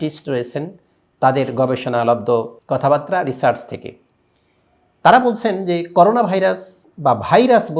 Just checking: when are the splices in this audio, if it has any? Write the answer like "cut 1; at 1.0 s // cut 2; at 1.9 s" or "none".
cut 1; at 2.6 s